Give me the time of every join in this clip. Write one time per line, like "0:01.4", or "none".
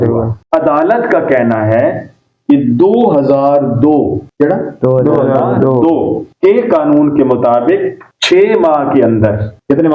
none